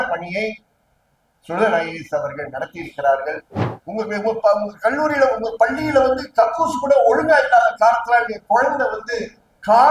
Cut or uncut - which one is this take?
cut